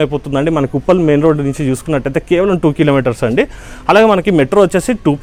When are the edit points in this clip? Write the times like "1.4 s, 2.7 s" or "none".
none